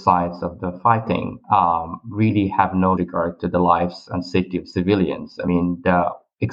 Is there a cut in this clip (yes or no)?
no